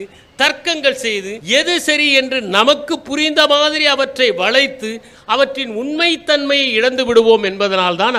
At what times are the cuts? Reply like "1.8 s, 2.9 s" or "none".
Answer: none